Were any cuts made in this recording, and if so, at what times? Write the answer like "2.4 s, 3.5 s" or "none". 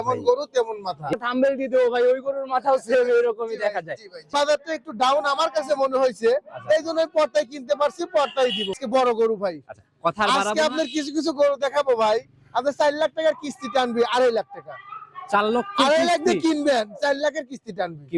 1.1 s, 4.3 s, 8.7 s